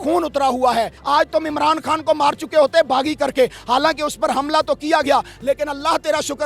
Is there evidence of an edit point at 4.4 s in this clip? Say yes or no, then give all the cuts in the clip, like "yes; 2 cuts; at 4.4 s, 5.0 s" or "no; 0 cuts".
no; 1 cut; at 1.0 s